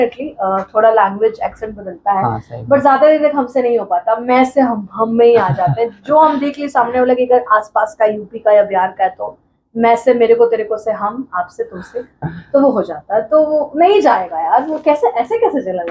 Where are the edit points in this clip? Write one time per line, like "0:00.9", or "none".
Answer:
none